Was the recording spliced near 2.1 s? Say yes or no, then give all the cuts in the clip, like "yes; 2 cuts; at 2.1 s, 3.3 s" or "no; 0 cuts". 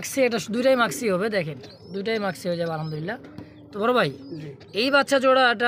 no; 0 cuts